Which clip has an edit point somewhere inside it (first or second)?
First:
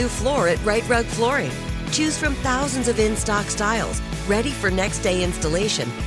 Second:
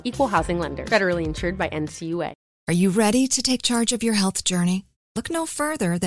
second